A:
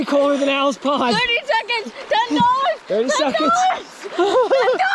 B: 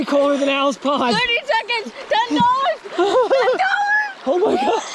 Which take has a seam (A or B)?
B